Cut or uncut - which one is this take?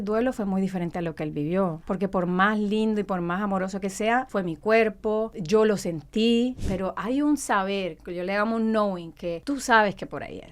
cut